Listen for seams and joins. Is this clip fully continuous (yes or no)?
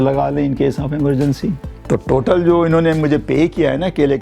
no